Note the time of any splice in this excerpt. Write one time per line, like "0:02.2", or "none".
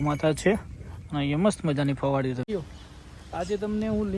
0:02.5